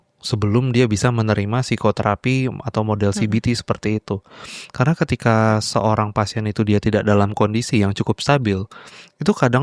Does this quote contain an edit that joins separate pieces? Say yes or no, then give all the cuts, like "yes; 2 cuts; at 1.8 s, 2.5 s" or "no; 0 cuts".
no; 0 cuts